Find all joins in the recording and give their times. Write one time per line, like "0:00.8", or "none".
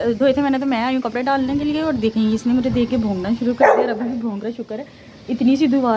none